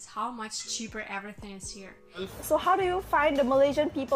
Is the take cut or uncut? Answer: cut